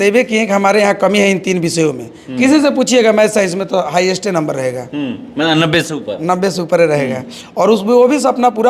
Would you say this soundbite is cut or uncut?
uncut